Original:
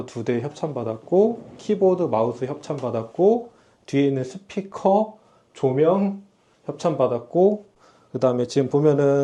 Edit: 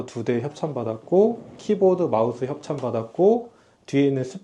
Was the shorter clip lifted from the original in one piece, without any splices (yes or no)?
yes